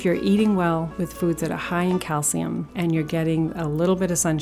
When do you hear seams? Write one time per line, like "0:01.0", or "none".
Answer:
0:00.9
0:02.7